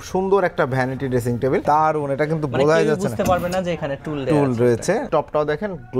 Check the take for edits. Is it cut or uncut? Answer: cut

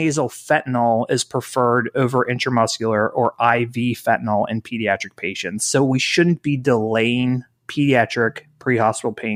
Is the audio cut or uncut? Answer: uncut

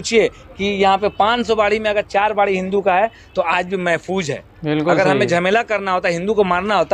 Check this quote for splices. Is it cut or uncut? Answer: uncut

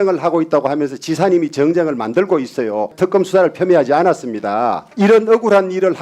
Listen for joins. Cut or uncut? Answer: cut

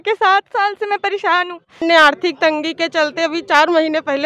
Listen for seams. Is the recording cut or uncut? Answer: cut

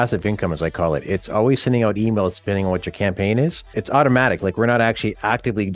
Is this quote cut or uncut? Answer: cut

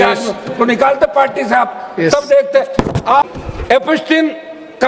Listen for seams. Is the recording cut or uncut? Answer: cut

